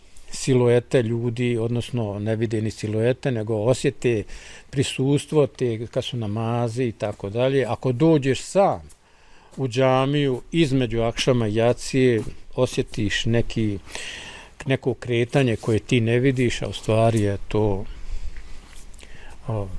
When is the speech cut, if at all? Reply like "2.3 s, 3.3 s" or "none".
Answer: none